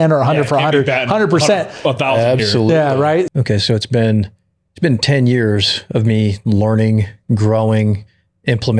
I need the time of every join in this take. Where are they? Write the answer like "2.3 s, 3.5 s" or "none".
3.3 s